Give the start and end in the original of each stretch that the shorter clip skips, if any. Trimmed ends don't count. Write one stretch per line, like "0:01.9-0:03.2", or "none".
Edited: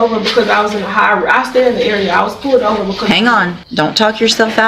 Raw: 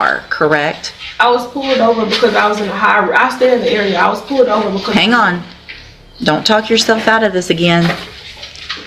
0:05.5-0:06.1